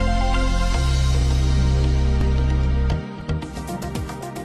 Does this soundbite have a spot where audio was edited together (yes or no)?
no